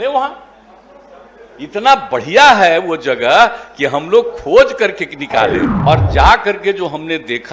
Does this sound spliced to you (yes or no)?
yes